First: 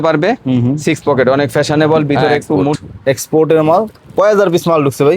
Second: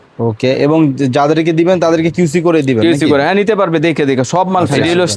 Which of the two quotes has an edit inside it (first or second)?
first